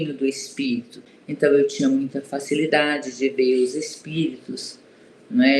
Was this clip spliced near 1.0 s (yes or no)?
yes